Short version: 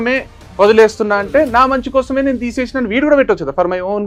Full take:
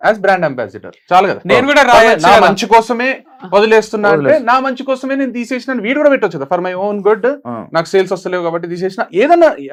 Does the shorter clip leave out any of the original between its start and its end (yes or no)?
no